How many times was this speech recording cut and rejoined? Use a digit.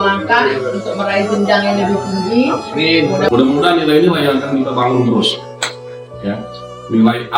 1